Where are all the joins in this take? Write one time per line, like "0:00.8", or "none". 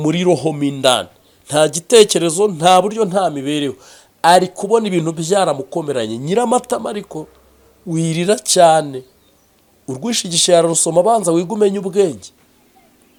none